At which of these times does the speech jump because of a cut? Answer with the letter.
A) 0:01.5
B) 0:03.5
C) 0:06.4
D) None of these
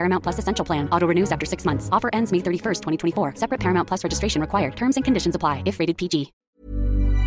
C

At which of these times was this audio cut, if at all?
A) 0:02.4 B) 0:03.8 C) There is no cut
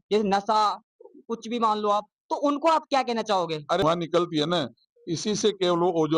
B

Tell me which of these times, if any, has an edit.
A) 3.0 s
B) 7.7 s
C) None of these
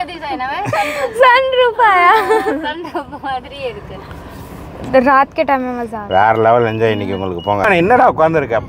B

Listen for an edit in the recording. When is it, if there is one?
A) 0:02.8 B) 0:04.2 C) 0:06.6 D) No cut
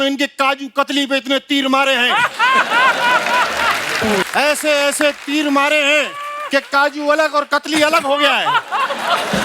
B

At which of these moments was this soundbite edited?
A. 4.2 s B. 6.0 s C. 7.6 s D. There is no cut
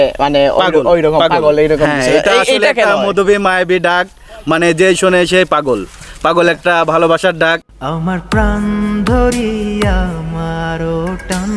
C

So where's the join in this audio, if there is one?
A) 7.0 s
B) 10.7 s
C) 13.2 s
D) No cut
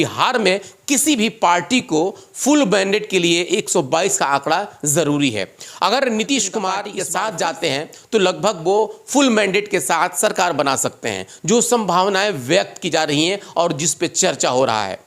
A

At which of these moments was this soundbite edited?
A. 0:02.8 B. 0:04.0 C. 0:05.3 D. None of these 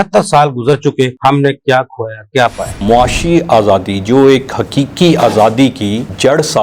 A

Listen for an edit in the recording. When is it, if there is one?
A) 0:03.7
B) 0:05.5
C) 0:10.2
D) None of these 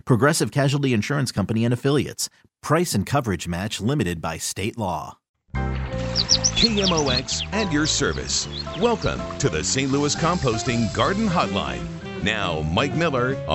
B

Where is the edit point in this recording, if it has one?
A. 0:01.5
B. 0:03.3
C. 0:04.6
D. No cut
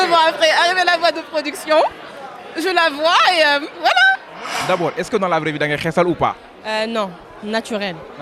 C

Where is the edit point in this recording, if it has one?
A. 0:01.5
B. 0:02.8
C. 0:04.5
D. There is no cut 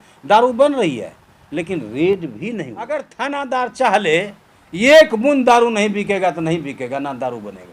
B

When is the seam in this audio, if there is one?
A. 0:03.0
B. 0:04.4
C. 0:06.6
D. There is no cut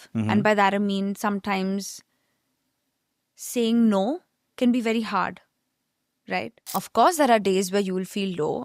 C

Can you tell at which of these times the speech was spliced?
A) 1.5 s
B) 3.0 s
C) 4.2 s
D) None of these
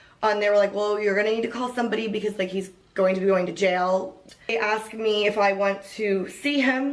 C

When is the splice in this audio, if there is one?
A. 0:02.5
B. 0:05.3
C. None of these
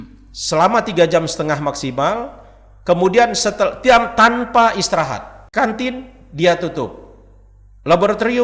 B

